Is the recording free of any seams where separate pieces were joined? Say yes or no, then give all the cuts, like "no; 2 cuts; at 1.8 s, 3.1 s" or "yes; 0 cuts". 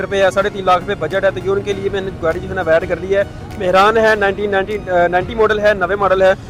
yes; 0 cuts